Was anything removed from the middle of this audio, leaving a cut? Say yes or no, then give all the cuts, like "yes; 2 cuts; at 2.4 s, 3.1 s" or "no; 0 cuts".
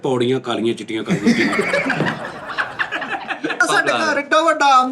yes; 1 cut; at 3.6 s